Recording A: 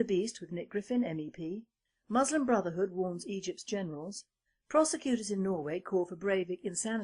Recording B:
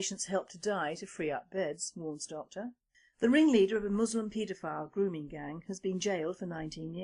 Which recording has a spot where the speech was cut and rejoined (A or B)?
A